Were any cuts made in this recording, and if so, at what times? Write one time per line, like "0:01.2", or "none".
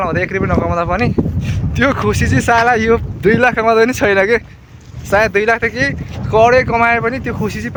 none